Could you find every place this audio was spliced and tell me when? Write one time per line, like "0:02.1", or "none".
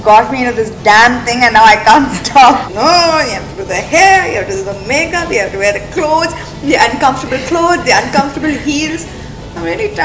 0:02.7